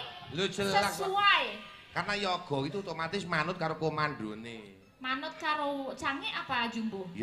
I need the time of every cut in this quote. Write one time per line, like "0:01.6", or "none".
none